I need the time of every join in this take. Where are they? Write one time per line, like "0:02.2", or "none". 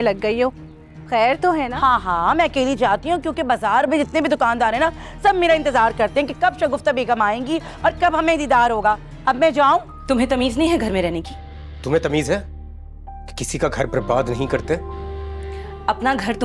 0:09.9